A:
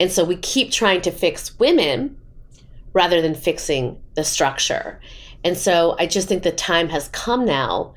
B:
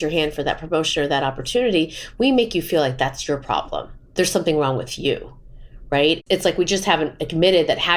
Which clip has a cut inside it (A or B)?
B